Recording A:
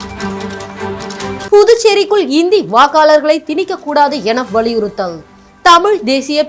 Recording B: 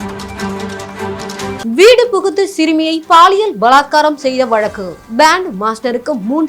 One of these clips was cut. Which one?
B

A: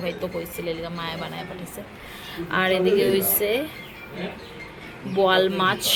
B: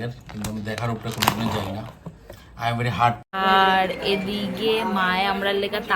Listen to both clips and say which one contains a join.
B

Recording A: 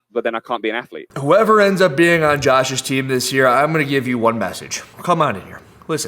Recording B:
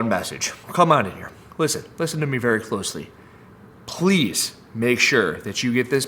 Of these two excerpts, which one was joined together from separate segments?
A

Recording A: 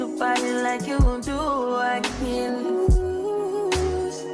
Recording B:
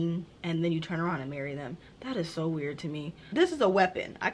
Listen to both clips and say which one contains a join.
B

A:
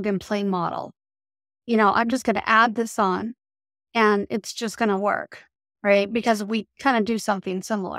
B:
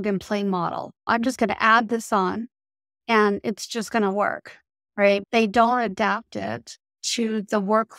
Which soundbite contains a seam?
B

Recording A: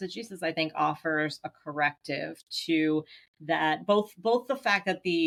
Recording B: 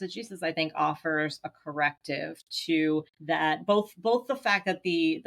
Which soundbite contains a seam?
B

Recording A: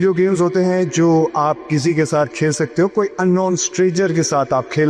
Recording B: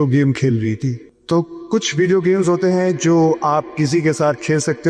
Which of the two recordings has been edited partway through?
B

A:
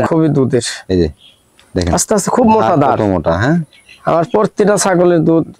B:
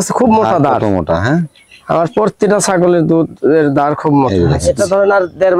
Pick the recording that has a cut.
B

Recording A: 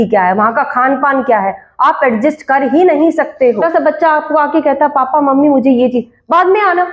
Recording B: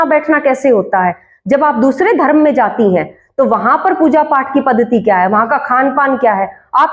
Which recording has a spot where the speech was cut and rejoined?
A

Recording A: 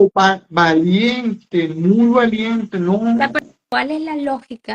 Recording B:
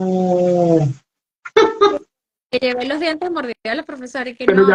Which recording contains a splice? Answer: A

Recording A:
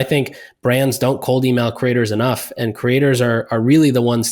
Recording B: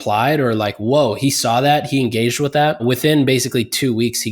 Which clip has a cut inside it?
B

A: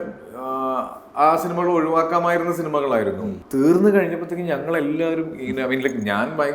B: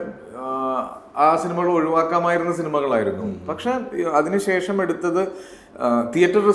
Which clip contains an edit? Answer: A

